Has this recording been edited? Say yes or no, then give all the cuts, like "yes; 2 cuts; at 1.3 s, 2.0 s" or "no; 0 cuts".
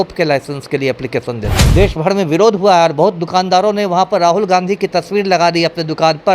yes; 1 cut; at 1.5 s